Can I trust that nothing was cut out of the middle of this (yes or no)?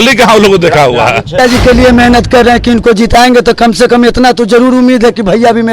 no